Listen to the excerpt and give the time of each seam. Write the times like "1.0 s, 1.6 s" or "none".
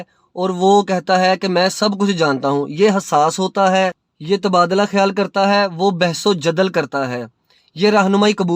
4.1 s